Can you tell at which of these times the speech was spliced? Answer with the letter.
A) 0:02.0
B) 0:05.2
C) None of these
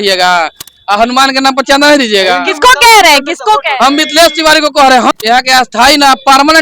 B